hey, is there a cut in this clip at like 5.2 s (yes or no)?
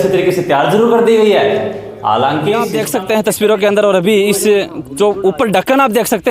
no